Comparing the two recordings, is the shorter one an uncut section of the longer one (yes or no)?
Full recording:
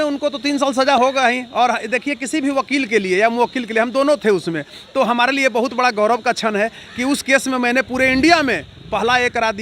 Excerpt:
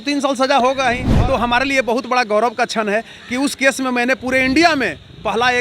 no